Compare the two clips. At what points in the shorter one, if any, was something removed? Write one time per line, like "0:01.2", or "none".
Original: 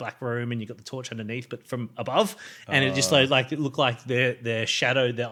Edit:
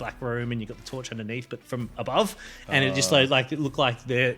none